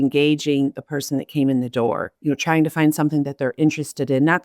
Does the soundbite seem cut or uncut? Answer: cut